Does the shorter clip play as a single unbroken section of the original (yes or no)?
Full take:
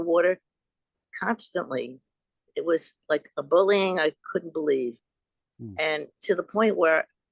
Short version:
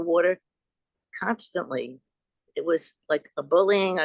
yes